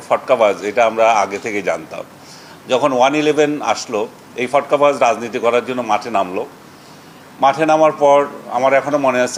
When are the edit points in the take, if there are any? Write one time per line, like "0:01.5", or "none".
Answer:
none